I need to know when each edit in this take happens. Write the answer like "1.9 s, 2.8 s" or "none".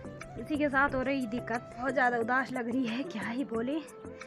1.8 s